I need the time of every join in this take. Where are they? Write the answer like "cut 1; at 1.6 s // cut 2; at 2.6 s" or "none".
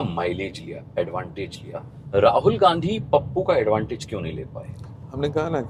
none

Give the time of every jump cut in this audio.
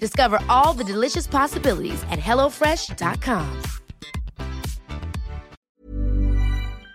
cut 1; at 5.6 s

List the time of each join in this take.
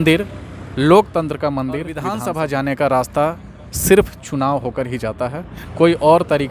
cut 1; at 2.1 s

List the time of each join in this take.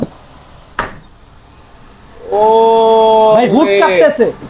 none

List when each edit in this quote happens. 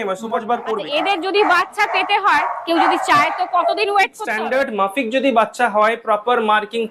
cut 1; at 0.8 s // cut 2; at 4.2 s

